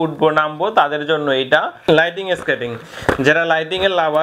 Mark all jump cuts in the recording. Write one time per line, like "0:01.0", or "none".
0:01.7